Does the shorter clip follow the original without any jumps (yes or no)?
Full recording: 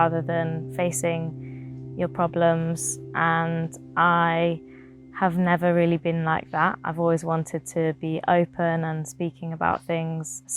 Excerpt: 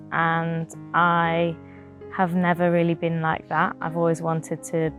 yes